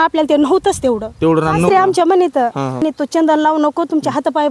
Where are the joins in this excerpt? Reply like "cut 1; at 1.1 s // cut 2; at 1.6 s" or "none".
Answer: cut 1; at 1.6 s // cut 2; at 2.8 s